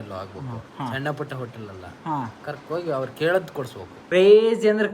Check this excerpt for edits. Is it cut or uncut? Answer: cut